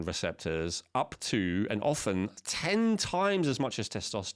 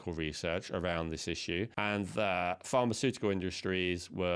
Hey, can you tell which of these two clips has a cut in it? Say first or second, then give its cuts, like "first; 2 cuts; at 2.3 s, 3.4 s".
second; 1 cut; at 1.7 s